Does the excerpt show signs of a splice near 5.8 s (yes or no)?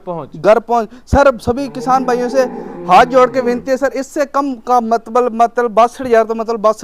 no